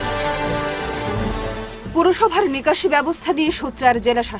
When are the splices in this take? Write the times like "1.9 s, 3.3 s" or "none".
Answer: none